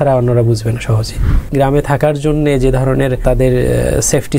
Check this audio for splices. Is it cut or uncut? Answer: cut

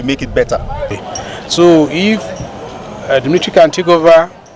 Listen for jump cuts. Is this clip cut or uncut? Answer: cut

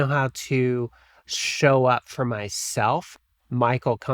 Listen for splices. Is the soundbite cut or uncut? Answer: cut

